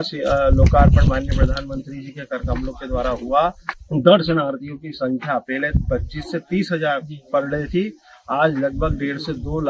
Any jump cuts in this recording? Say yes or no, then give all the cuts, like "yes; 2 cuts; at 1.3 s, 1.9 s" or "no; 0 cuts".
yes; 1 cut; at 3.7 s